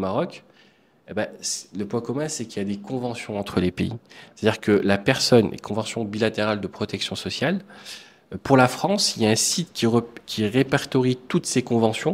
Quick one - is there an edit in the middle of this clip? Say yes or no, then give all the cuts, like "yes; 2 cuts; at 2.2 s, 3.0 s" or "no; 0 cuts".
no; 0 cuts